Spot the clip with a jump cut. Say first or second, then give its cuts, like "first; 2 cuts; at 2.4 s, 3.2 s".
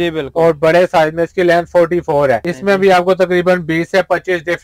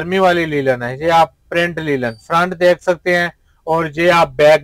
first; 1 cut; at 2.5 s